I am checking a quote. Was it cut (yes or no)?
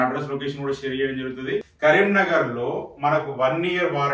yes